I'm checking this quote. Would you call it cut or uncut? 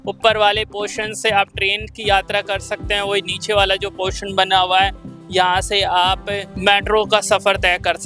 cut